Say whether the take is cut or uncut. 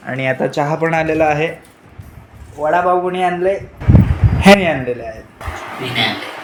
uncut